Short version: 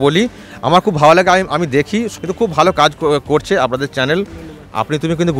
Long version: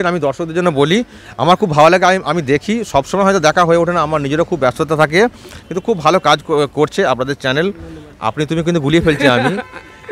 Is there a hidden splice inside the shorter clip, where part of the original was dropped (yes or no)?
yes